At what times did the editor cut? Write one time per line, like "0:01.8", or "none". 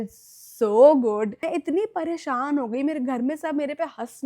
0:01.4